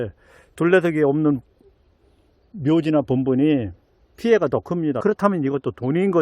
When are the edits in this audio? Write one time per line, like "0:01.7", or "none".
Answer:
0:05.0